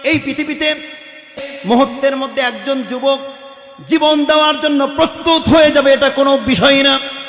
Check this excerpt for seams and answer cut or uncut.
cut